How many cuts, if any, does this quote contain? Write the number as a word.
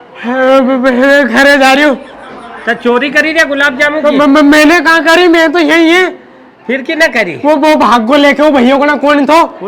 zero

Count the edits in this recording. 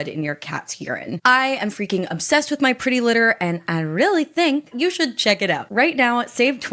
three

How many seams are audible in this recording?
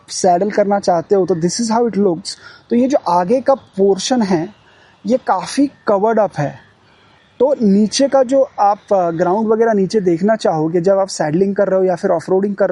zero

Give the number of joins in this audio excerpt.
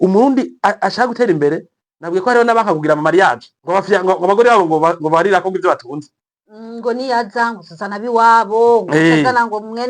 one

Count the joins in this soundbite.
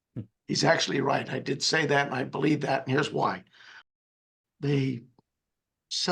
one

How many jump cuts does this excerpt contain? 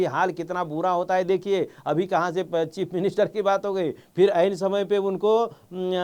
zero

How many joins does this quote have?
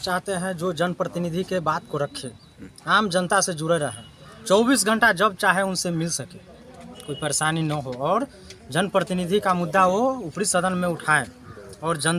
zero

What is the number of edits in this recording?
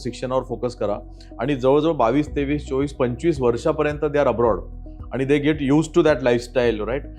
zero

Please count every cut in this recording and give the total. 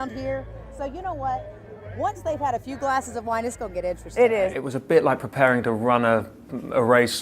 one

